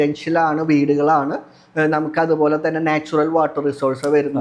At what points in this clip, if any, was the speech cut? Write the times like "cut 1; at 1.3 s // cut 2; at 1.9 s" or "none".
none